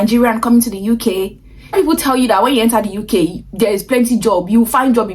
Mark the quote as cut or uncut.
cut